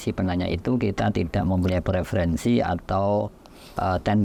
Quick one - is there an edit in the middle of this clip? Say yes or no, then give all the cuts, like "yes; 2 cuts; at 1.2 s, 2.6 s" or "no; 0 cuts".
no; 0 cuts